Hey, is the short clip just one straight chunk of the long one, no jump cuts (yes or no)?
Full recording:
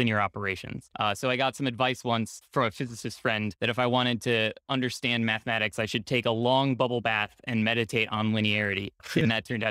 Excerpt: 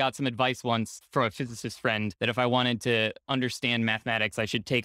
yes